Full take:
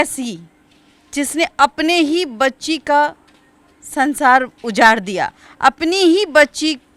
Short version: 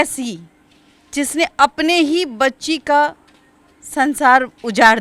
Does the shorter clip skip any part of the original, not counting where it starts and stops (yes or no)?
no